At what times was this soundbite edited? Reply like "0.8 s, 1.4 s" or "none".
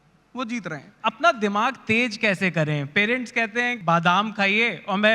0.9 s, 3.8 s